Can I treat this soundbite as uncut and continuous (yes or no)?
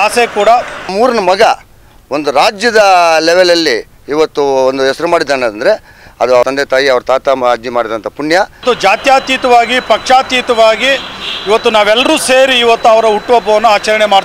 no